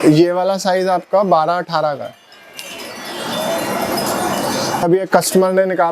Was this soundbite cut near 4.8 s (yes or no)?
yes